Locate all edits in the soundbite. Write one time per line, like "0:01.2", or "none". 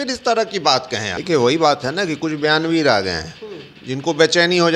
0:01.1